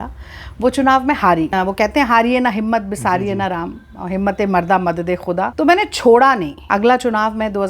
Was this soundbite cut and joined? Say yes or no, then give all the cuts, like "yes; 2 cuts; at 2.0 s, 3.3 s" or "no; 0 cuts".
yes; 3 cuts; at 1.5 s, 5.5 s, 6.5 s